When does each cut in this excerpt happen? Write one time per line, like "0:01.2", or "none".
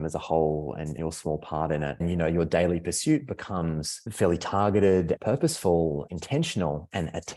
0:01.9
0:04.0
0:05.2
0:06.1